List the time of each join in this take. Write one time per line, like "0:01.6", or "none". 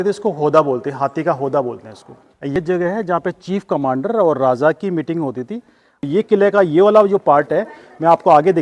0:02.6
0:06.0